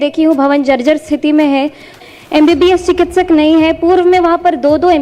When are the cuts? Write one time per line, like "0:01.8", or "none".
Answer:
0:01.9